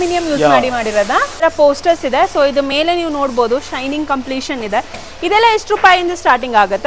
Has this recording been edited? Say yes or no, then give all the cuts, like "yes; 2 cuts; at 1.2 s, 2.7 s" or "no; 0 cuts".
yes; 1 cut; at 1.4 s